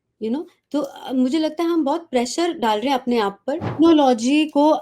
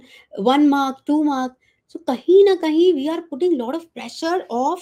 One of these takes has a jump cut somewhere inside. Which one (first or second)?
first